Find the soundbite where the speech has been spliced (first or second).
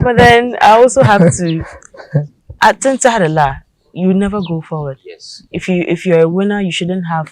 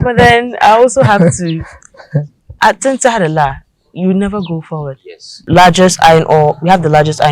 second